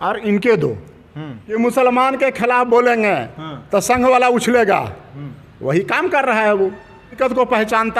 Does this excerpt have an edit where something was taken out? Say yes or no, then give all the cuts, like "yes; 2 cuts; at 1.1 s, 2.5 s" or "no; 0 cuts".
yes; 2 cuts; at 1.0 s, 7.1 s